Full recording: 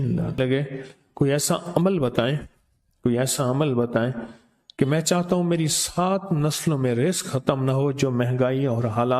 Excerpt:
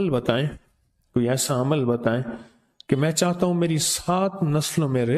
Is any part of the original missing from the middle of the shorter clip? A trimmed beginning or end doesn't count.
no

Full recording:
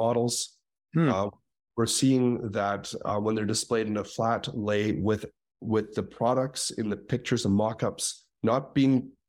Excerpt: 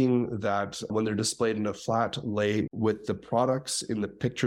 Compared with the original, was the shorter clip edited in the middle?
yes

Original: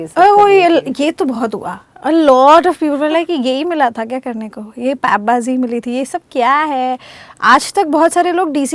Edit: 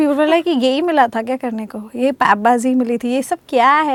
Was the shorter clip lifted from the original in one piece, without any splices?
yes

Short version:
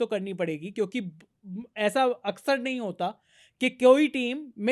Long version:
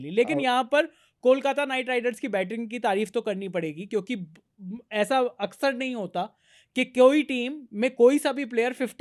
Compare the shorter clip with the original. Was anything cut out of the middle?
no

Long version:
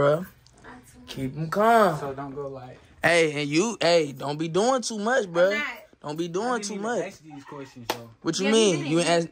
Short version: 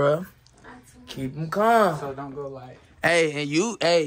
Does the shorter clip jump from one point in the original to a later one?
no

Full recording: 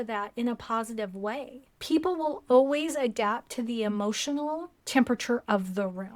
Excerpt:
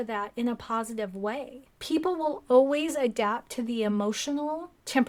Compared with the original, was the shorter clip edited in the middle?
no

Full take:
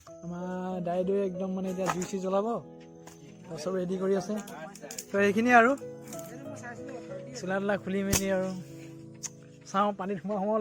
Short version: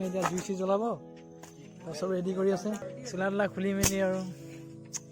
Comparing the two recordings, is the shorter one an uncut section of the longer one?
no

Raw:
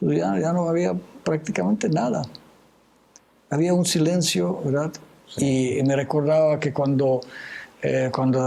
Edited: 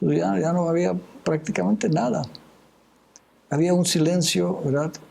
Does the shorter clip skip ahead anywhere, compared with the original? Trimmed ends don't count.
no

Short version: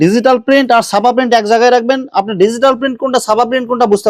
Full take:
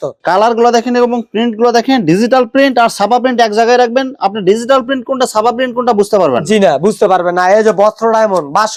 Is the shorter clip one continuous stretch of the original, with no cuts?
yes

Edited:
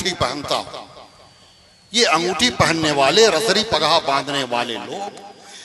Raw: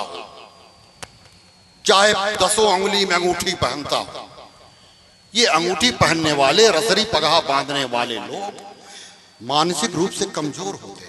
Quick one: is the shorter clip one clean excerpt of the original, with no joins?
yes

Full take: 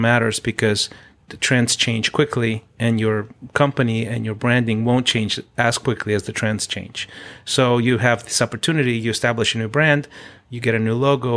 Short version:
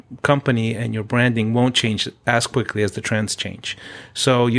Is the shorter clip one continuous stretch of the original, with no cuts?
yes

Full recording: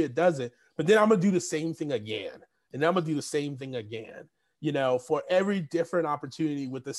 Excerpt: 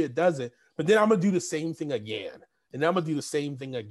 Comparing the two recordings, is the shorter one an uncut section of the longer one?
yes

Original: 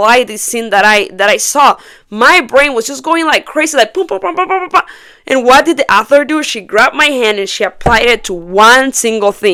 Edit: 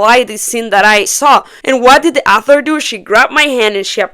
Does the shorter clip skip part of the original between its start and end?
yes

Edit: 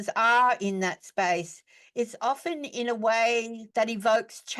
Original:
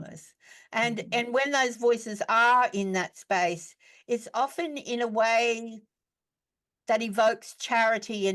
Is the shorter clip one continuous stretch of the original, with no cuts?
no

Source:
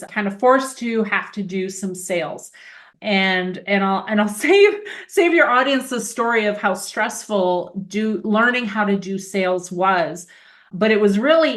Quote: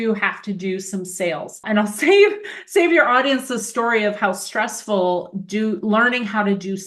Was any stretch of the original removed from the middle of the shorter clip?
yes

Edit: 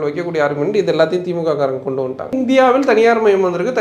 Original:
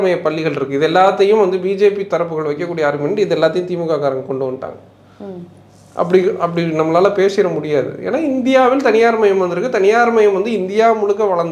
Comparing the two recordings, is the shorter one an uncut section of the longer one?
no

